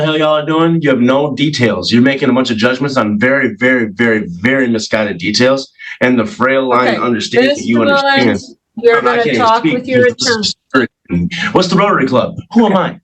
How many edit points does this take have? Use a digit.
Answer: 0